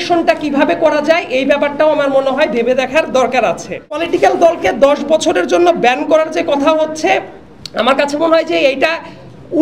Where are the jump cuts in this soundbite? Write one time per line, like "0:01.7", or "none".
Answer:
0:04.0